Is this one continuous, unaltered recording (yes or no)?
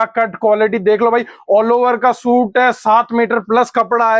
yes